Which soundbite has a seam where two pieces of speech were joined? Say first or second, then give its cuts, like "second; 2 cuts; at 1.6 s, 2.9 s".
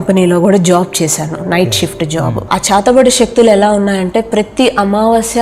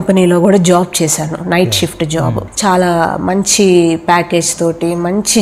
first; 1 cut; at 2.4 s